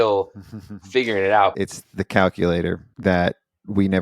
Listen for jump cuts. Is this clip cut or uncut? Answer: cut